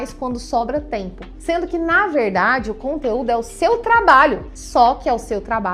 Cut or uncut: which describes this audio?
uncut